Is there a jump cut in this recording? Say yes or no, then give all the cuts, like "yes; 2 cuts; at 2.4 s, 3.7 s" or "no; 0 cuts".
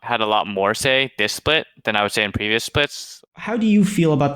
yes; 1 cut; at 3.2 s